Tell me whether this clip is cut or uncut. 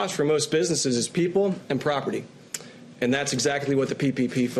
uncut